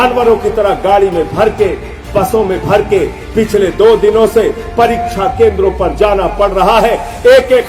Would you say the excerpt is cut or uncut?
uncut